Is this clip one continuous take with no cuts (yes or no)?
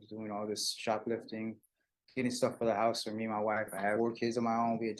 no